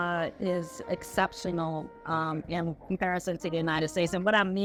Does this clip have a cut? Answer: no; 0 cuts

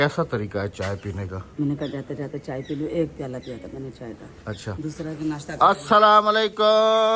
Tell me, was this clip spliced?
no; 0 cuts

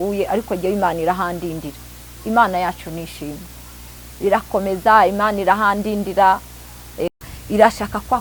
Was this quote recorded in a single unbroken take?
no; 1 cut; at 7.2 s

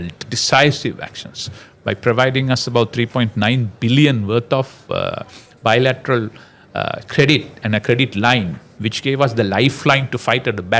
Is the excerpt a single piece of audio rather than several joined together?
yes; 0 cuts

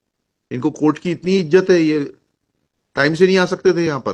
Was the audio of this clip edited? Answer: no; 0 cuts

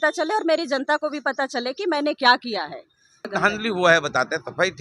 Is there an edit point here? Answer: yes; 1 cut; at 3.3 s

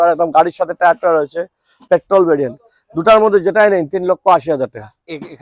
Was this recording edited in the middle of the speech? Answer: no; 0 cuts

